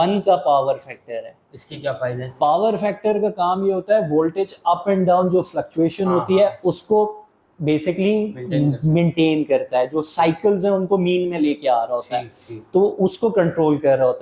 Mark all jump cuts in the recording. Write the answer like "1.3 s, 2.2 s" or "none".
none